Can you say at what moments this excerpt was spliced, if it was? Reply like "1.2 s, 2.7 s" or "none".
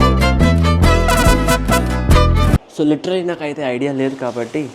2.6 s